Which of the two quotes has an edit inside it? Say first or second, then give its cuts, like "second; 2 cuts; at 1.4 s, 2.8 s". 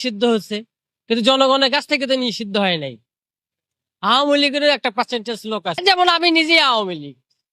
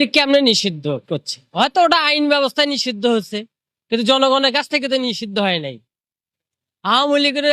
first; 1 cut; at 5.7 s